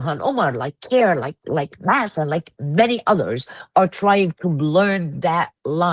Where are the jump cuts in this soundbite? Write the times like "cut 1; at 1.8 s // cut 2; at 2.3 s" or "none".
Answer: none

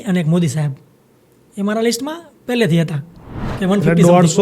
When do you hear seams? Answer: cut 1; at 3.4 s

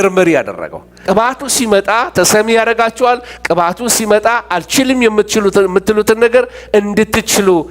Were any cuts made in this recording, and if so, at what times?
cut 1; at 1.0 s

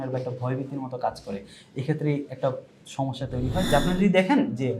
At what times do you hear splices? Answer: cut 1; at 3.7 s

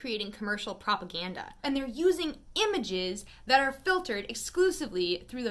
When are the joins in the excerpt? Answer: cut 1; at 1.4 s

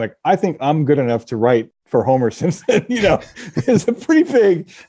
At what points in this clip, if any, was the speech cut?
none

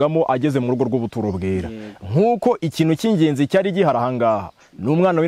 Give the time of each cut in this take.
none

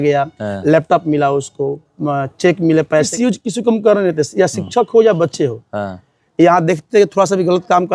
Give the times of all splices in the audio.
cut 1; at 3.1 s

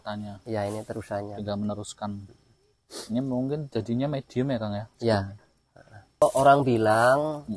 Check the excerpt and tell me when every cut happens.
cut 1; at 6.2 s

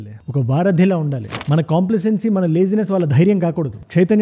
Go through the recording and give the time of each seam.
cut 1; at 1.2 s

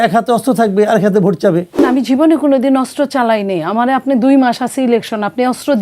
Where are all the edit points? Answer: cut 1; at 1.8 s

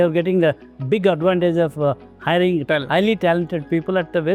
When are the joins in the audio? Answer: cut 1; at 2.6 s

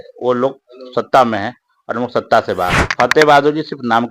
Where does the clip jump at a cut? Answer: cut 1; at 3.1 s

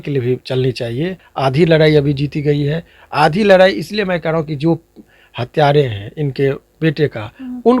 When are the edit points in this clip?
cut 1; at 1.2 s

